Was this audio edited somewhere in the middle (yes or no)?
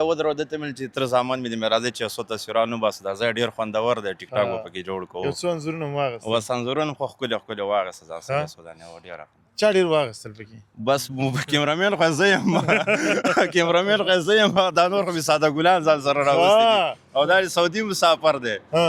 no